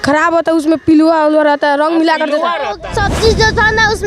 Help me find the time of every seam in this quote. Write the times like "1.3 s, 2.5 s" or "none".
2.8 s